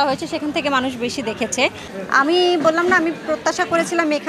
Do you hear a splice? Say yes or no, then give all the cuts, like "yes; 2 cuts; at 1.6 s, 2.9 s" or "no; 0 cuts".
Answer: yes; 1 cut; at 1.9 s